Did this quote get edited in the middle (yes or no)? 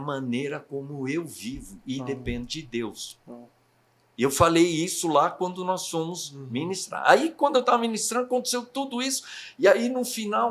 no